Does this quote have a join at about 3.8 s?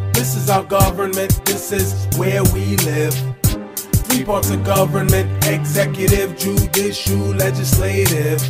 no; 0 cuts

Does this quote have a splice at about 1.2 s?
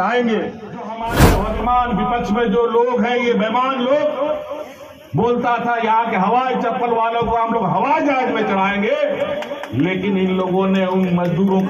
yes; 1 cut; at 1.2 s

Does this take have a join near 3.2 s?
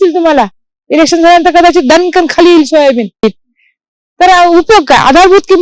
yes; 1 cut; at 3.2 s

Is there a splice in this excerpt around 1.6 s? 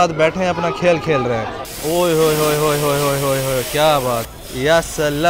yes; 2 cuts; at 1.6 s, 4.3 s

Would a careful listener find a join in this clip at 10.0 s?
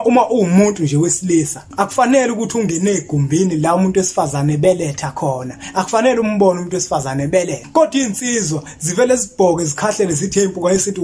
no; 2 cuts; at 1.6 s, 7.6 s

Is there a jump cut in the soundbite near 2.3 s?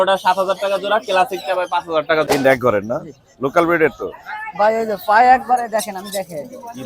yes; 1 cut; at 2.3 s

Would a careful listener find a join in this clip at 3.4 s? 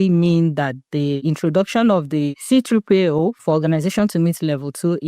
yes; 3 cuts; at 1.2 s, 2.4 s, 3.4 s

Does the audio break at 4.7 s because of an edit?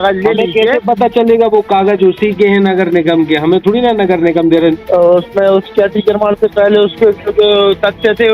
yes; 1 cut; at 4.7 s

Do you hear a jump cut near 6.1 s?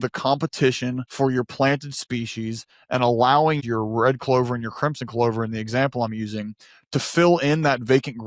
no; 2 cuts; at 1.0 s, 3.6 s

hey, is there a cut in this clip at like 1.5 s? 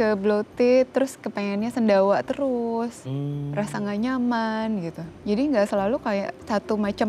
no; 1 cut; at 5.1 s

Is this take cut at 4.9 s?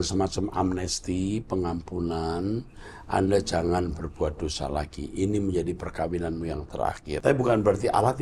no; 1 cut; at 7.2 s

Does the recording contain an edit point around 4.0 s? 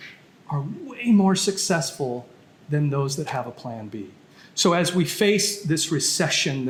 no; 0 cuts

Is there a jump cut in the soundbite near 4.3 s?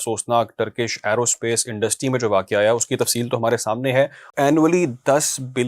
yes; 1 cut; at 4.3 s

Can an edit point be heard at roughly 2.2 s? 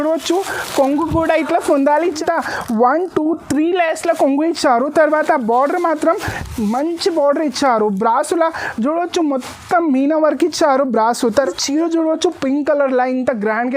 yes; 2 cuts; at 2.2 s, 11.3 s

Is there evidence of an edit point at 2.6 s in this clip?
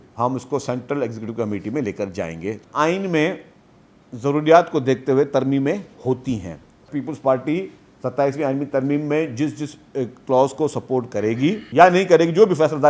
yes; 3 cuts; at 2.6 s, 6.8 s, 11.6 s

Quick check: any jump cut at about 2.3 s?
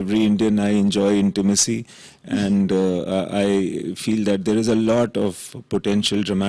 no; 0 cuts

